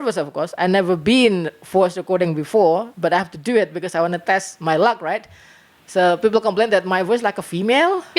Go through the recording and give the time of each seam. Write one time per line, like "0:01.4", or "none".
none